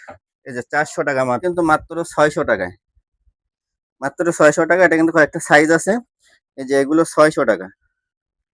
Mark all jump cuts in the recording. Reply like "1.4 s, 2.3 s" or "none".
1.4 s